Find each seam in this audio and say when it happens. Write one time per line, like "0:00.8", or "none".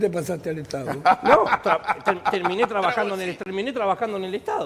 0:03.4